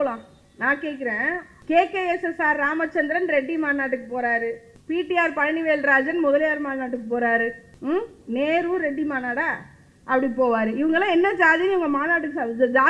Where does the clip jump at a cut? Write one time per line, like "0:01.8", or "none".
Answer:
0:01.5
0:04.7
0:07.7